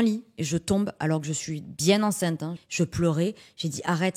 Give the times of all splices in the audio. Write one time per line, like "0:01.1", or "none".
0:02.6